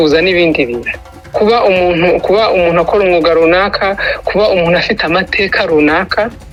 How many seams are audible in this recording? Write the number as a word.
zero